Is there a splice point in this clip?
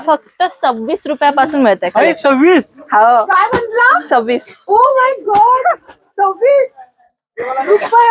no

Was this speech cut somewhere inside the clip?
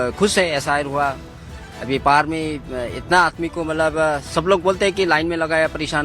no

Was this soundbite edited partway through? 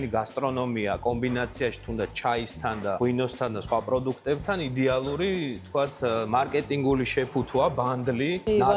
no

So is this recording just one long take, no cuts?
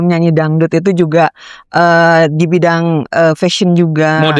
yes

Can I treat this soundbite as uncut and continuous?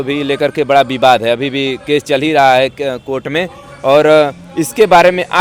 yes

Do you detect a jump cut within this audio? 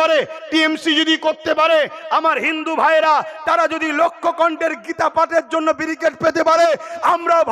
no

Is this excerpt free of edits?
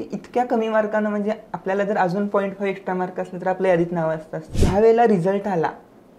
no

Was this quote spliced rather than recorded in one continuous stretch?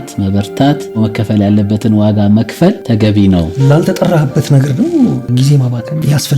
yes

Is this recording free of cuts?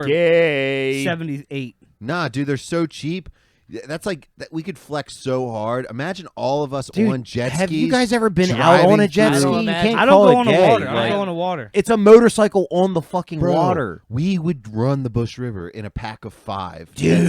no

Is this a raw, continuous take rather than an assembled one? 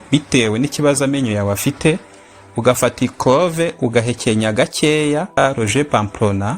no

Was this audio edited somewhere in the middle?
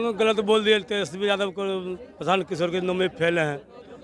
no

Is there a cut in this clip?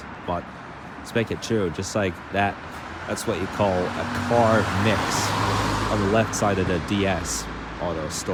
no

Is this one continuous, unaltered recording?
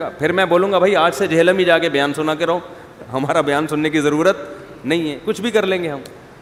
yes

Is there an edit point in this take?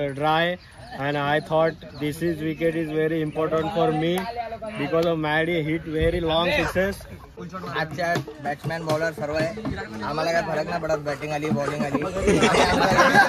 yes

